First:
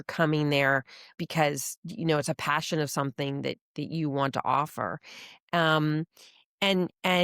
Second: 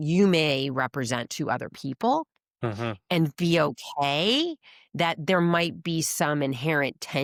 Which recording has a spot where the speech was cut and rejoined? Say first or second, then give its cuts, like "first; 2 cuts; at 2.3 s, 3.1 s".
first; 1 cut; at 1.1 s